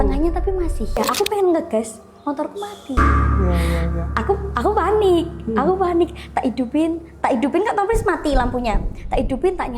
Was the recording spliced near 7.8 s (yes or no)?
no